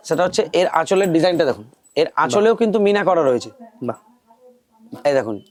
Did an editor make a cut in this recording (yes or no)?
no